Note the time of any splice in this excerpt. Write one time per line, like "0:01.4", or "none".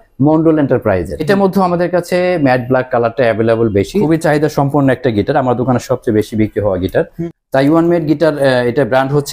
0:01.2
0:04.0
0:07.2